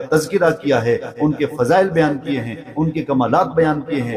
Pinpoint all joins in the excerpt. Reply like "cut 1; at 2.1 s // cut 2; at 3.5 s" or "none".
none